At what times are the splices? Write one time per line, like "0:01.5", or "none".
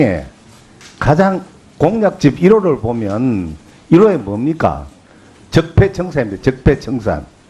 none